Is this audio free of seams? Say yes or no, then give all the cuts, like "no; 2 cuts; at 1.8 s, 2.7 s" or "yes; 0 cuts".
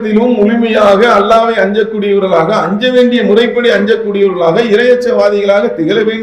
yes; 0 cuts